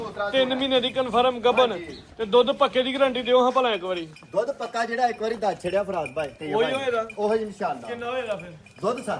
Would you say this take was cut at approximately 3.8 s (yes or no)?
no